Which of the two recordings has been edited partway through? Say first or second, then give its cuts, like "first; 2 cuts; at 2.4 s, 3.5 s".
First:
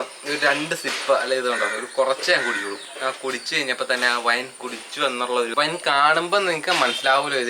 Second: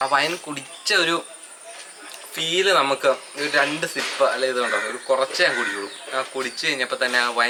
first; 1 cut; at 5.5 s